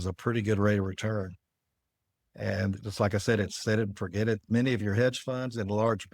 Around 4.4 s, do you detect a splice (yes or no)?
yes